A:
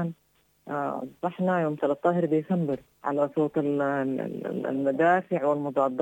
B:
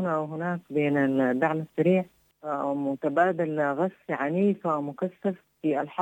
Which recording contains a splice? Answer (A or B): A